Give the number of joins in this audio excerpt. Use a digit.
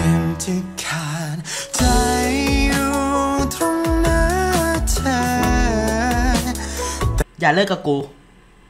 1